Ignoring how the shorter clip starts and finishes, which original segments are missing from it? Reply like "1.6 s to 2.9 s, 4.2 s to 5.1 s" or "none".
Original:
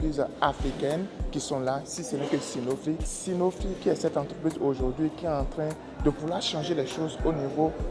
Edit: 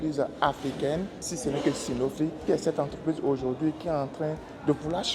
1.2 s to 1.9 s, 3.1 s to 3.8 s